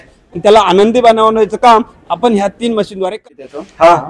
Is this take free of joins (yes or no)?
no